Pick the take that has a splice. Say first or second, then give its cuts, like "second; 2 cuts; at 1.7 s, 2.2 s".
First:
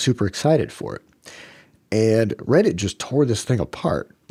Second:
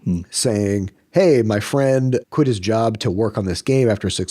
second; 1 cut; at 2.2 s